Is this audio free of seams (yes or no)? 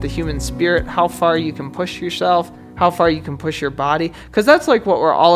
no